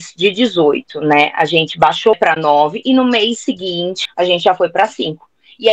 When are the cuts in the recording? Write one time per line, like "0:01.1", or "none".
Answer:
0:02.2
0:04.0